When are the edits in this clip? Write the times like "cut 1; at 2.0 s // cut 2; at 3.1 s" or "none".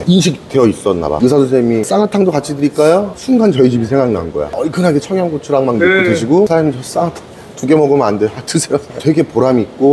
cut 1; at 1.2 s // cut 2; at 4.5 s // cut 3; at 9.0 s